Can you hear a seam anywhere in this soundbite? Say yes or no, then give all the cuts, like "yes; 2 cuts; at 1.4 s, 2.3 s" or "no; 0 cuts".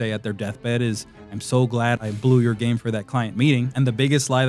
yes; 2 cuts; at 2.0 s, 3.7 s